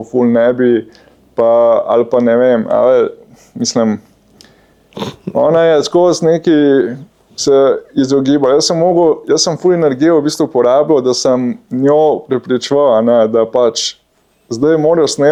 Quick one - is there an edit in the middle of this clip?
no; 0 cuts

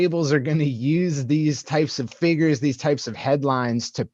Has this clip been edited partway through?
no; 0 cuts

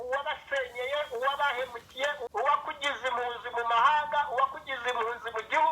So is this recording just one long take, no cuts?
no; 1 cut; at 2.2 s

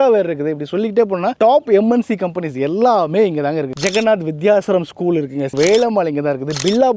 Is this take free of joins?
no; 2 cuts; at 3.7 s, 5.5 s

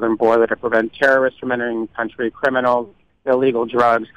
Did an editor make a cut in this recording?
no; 0 cuts

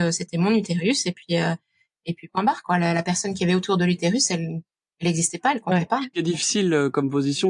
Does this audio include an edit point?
yes; 1 cut; at 6.2 s

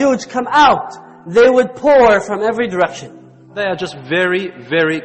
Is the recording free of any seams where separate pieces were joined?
no; 1 cut; at 3.5 s

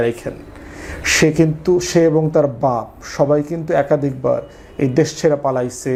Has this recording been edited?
no; 0 cuts

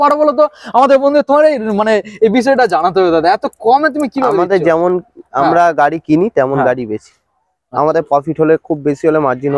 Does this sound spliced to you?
no; 0 cuts

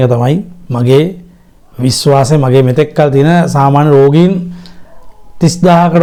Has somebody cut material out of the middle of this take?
no; 0 cuts

